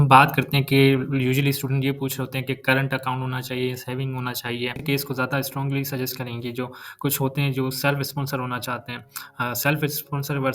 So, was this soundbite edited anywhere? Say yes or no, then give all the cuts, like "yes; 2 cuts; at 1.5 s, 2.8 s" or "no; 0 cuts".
yes; 1 cut; at 4.8 s